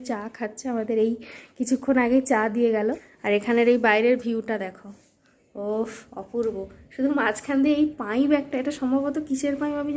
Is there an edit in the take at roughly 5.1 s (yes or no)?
no